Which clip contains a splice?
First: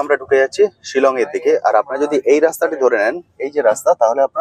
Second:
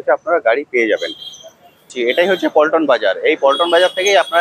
second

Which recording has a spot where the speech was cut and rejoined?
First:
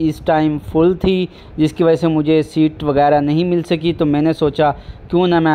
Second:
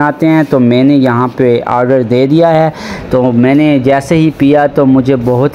second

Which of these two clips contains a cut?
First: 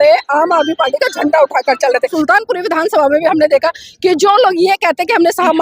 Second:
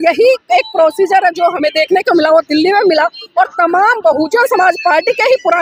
first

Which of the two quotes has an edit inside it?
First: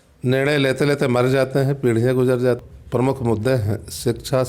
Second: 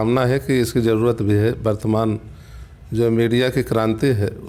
first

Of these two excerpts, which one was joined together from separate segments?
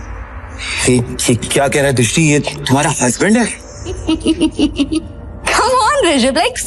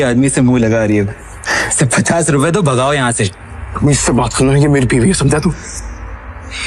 first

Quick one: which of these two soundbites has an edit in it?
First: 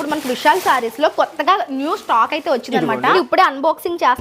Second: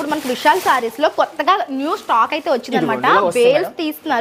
first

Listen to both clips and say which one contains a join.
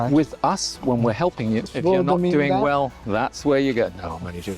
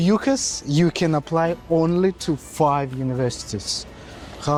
first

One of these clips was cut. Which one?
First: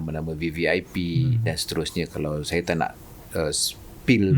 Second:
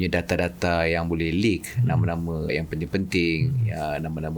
second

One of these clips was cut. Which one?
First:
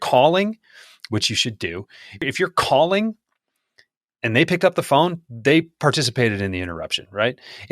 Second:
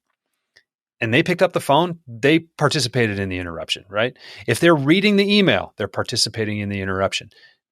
first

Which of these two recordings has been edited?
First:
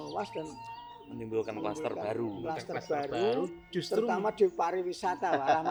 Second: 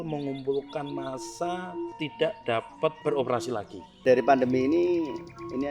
second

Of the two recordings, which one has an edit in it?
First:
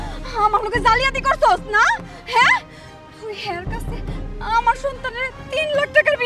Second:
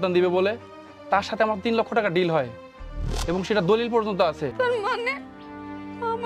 second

